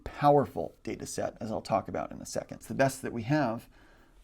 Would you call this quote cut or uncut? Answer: cut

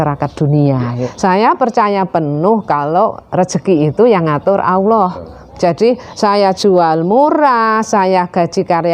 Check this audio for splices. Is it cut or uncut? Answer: cut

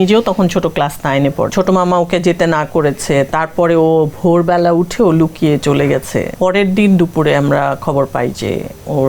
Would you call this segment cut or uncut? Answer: cut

